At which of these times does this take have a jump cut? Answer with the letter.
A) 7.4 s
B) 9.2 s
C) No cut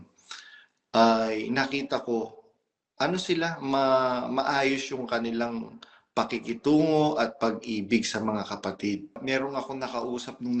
B